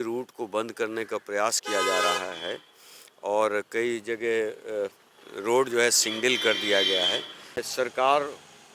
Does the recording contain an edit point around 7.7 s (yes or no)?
yes